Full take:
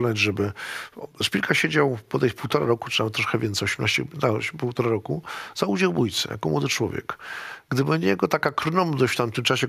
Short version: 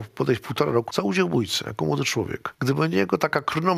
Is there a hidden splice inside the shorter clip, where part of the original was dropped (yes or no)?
yes